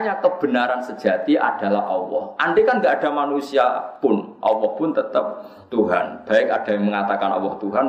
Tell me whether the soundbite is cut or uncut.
cut